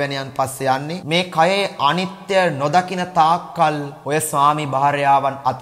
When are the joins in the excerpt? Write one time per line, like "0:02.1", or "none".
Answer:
0:01.0
0:03.9